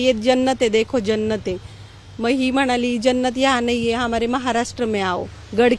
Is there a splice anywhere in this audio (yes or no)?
no